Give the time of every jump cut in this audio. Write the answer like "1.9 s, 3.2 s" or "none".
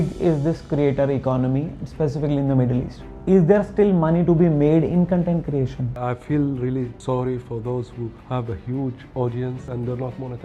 3.0 s, 5.9 s, 7.0 s, 8.2 s, 9.6 s

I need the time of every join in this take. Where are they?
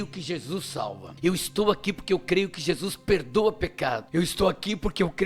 1.0 s, 4.1 s

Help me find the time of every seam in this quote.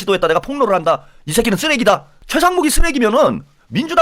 2.2 s

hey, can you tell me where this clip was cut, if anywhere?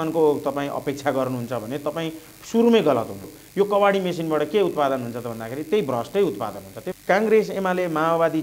3.4 s, 6.8 s

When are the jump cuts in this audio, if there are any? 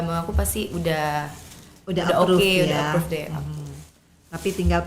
none

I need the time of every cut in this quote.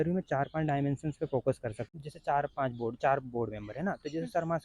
1.9 s

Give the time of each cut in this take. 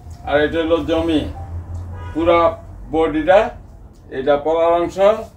none

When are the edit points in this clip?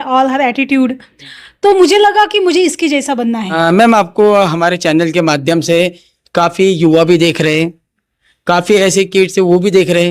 3.5 s

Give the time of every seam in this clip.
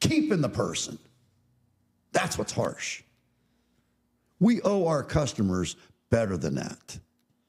none

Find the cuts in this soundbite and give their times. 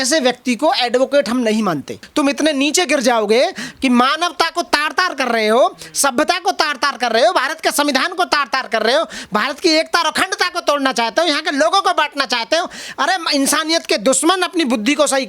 2.0 s

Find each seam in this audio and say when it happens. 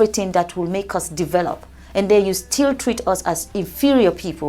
none

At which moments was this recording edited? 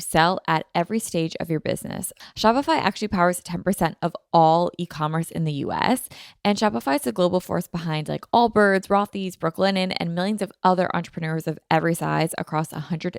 2.1 s

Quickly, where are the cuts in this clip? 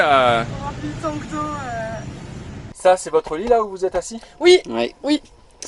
none

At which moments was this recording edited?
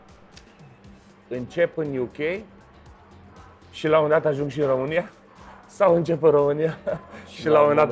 none

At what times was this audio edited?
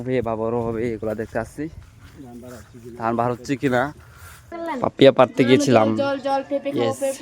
4.5 s

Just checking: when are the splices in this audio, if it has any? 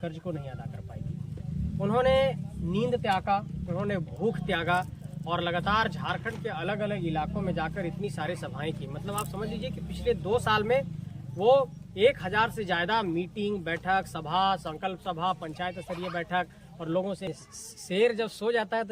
17.3 s

